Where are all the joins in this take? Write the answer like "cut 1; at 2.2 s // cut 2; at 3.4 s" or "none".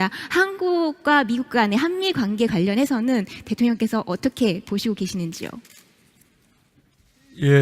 cut 1; at 1.3 s